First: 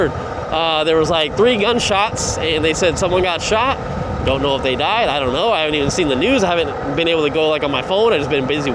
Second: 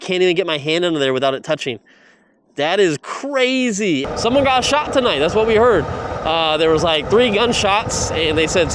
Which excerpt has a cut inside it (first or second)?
second